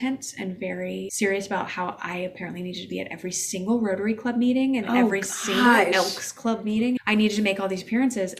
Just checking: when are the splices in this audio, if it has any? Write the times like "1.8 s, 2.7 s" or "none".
1.1 s, 7.0 s